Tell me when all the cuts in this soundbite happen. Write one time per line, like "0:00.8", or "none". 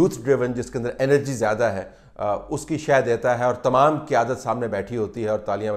none